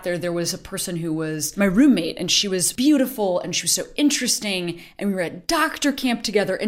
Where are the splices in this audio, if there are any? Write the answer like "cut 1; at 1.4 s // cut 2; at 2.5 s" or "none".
cut 1; at 1.5 s // cut 2; at 2.7 s

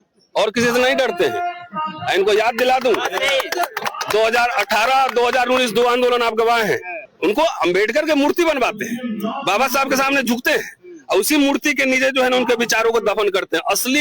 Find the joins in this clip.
none

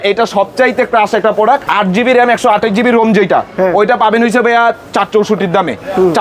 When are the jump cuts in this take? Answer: none

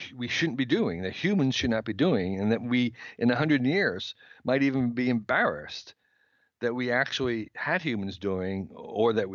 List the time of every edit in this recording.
none

